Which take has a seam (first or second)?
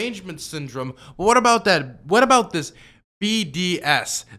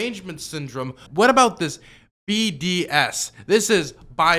second